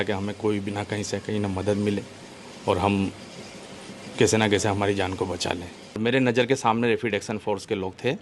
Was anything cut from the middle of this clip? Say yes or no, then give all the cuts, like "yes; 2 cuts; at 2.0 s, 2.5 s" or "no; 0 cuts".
yes; 1 cut; at 6.0 s